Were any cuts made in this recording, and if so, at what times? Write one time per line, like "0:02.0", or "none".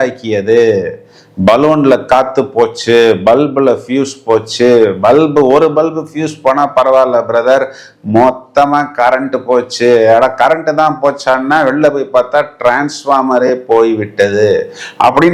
none